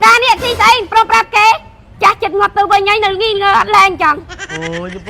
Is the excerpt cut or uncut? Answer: uncut